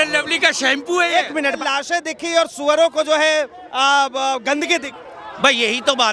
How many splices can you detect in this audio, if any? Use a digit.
1